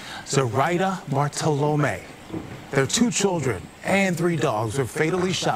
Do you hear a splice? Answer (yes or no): no